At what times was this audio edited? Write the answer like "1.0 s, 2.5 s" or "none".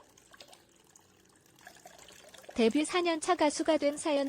2.5 s